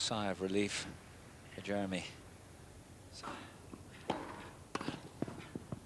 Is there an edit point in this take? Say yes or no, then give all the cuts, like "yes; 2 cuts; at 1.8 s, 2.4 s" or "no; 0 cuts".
no; 0 cuts